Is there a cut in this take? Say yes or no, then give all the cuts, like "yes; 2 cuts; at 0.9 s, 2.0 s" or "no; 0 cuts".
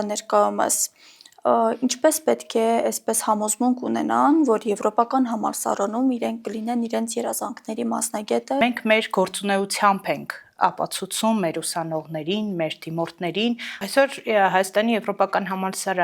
yes; 2 cuts; at 8.6 s, 13.7 s